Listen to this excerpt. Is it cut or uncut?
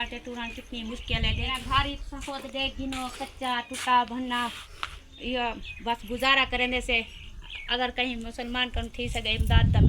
cut